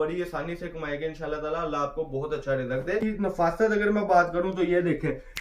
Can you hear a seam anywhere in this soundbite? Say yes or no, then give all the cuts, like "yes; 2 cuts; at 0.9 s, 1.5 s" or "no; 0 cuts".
yes; 1 cut; at 3.0 s